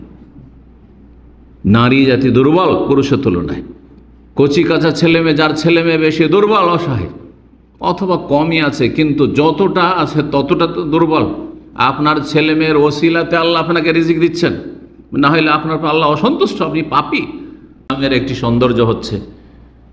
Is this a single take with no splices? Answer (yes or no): no